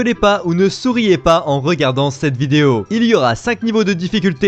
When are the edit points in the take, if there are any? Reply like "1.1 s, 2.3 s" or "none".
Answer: 3.5 s